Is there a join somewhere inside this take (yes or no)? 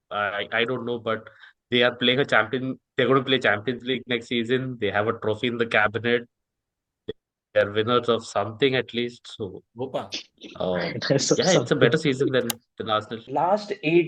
yes